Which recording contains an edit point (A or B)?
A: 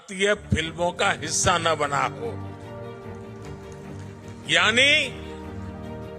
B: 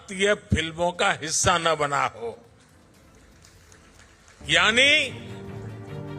A